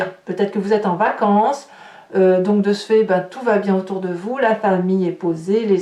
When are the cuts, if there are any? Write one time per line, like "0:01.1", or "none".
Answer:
none